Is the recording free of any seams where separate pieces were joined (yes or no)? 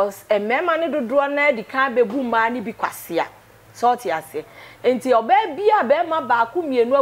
yes